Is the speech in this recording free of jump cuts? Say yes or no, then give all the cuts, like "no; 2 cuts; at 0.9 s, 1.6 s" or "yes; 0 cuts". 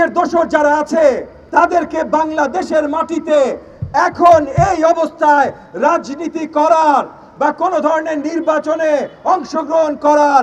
no; 1 cut; at 1.3 s